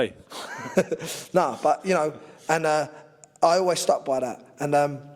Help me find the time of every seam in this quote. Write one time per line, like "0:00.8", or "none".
none